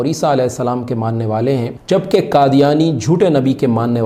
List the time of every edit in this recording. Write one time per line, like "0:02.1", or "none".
0:01.7